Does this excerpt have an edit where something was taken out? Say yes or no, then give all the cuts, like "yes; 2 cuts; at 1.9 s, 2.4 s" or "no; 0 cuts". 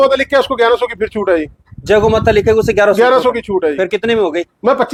no; 0 cuts